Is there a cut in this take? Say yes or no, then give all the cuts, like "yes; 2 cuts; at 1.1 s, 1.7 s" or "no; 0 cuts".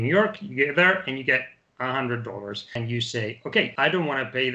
yes; 2 cuts; at 2.8 s, 3.7 s